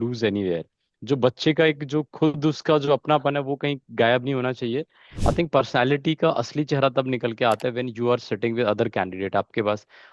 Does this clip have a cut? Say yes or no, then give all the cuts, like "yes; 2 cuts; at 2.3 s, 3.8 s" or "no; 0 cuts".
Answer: yes; 1 cut; at 5.0 s